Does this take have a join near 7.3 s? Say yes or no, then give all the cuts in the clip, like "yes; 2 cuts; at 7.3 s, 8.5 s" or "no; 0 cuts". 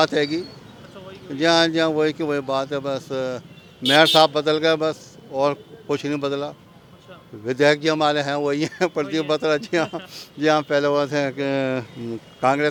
no; 0 cuts